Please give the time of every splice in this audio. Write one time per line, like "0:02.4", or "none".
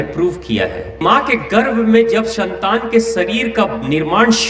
0:01.0